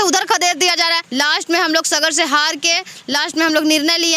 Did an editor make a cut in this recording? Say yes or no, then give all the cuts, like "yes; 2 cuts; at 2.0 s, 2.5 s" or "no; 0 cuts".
yes; 1 cut; at 1.0 s